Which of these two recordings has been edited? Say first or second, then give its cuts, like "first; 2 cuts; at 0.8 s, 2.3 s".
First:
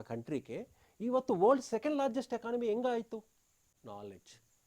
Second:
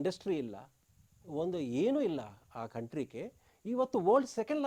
first; 1 cut; at 3.7 s